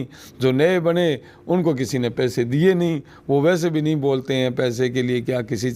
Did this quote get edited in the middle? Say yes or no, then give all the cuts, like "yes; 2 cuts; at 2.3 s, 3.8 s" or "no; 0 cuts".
no; 0 cuts